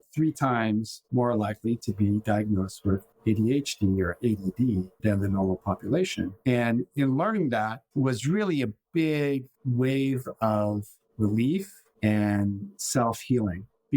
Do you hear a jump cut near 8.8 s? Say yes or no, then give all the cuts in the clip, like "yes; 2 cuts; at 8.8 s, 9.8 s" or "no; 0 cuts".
no; 1 cut; at 1.0 s